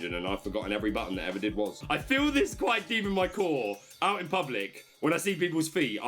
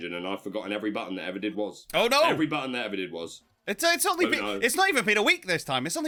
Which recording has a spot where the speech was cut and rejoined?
first; 1 cut; at 1.8 s

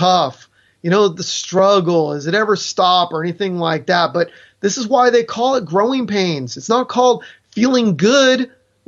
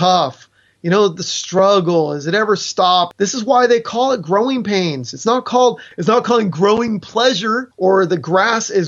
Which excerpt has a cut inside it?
second; 3 cuts; at 3.1 s, 5.9 s, 7.7 s

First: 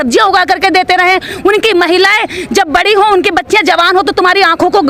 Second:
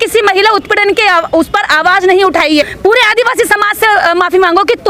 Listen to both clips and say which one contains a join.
second; 1 cut; at 2.7 s

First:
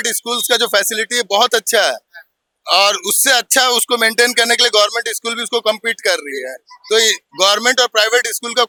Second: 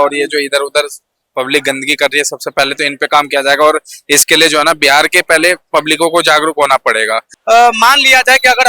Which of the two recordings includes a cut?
second; 1 cut; at 7.3 s

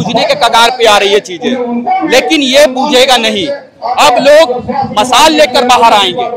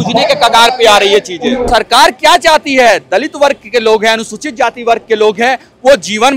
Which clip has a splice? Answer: second; 1 cut; at 1.7 s

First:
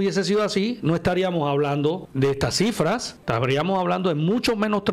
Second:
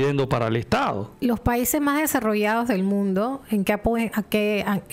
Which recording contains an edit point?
first; 2 cuts; at 2.1 s, 3.1 s

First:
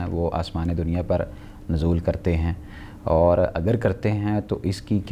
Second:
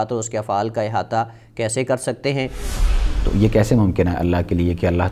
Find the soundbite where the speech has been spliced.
second; 1 cut; at 2.7 s

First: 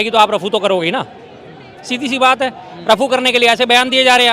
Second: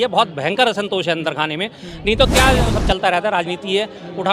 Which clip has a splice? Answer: second; 1 cut; at 2.5 s

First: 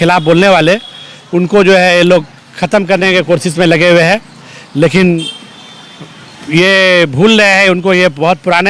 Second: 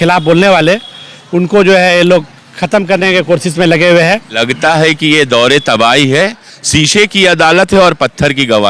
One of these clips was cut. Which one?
second; 1 cut; at 4.4 s

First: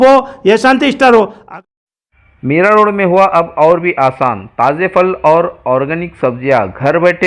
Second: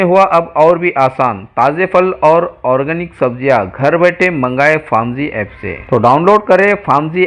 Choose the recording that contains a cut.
first; 1 cut; at 1.4 s

